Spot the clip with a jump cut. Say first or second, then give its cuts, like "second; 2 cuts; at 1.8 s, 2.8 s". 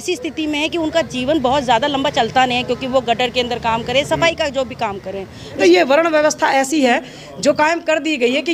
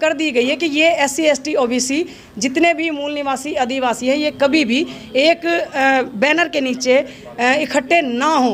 first; 1 cut; at 5.6 s